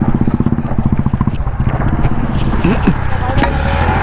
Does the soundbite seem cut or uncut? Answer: uncut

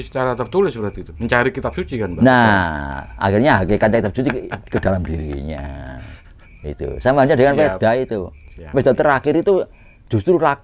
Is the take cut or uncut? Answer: uncut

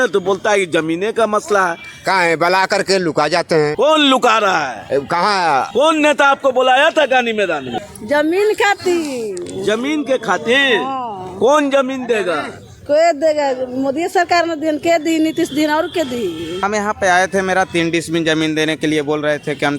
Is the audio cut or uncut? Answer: cut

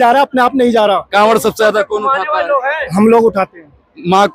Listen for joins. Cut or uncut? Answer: uncut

